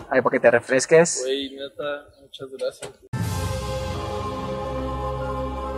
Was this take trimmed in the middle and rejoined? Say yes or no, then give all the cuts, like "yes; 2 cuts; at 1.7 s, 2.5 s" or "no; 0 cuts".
no; 0 cuts